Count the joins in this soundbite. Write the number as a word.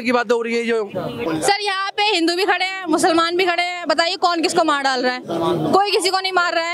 one